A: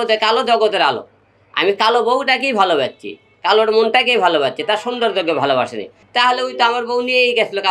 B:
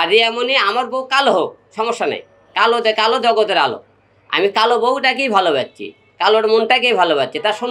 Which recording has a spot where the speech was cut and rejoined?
A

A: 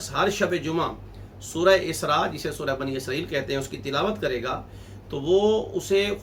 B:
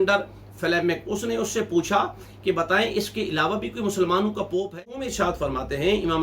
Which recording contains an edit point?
B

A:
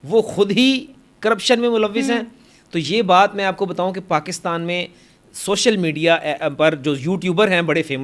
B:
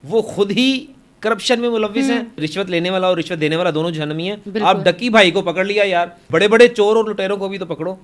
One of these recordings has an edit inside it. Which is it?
B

